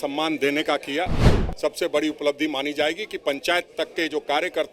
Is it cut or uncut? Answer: cut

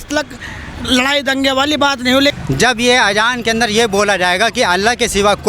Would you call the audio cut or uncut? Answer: cut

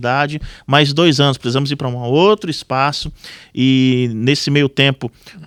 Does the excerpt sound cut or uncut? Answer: uncut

